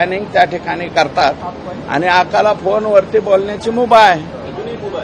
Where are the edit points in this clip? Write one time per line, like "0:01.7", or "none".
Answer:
none